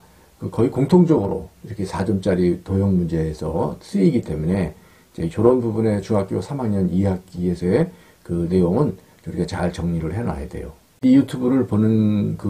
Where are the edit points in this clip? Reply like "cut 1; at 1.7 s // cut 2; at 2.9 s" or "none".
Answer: cut 1; at 10.8 s

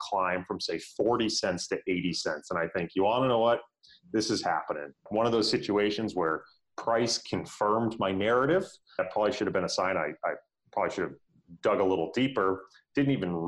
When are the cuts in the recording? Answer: cut 1; at 5.0 s // cut 2; at 9.0 s

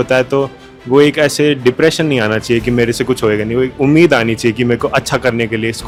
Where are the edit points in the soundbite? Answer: none

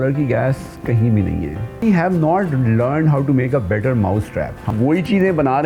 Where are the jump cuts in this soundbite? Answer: cut 1; at 1.8 s // cut 2; at 4.6 s

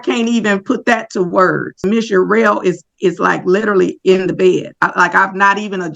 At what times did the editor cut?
cut 1; at 1.8 s

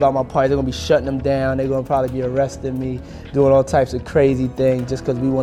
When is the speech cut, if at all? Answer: none

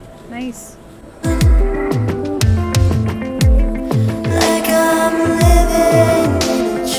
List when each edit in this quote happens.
none

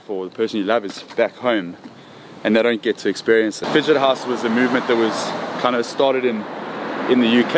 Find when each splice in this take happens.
cut 1; at 3.6 s

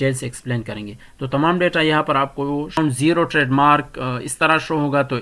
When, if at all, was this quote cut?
cut 1; at 2.8 s

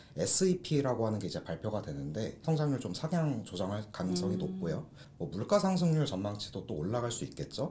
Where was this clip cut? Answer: cut 1; at 2.4 s // cut 2; at 5.0 s

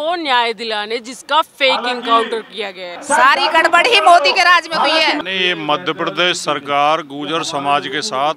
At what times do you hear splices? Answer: cut 1; at 2.9 s // cut 2; at 5.2 s

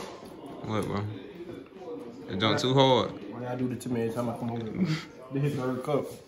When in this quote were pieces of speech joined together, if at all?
none

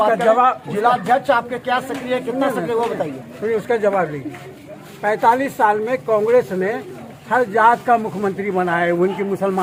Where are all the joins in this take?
none

